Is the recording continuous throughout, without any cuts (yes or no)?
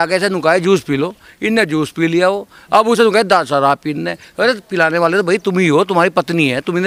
yes